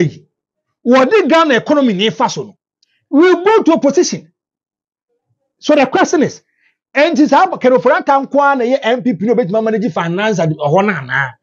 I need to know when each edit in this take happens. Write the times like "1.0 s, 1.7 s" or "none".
none